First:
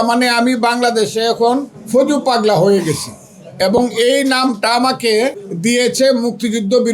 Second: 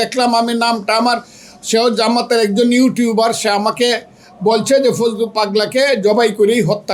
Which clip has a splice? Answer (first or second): first